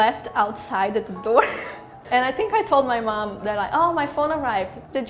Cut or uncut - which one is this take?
cut